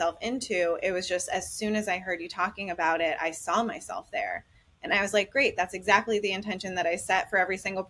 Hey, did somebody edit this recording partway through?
no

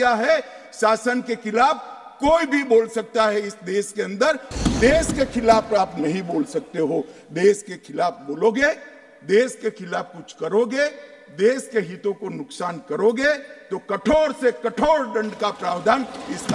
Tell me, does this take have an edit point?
yes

